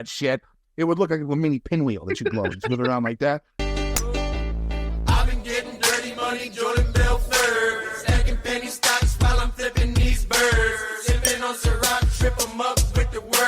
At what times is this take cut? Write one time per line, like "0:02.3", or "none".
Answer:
0:03.6